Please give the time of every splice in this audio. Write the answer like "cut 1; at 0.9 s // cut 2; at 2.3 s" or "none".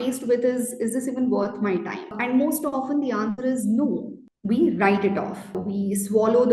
cut 1; at 4.3 s // cut 2; at 5.6 s